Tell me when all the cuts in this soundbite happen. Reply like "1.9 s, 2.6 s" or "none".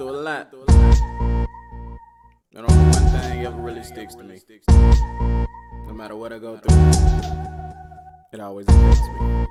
none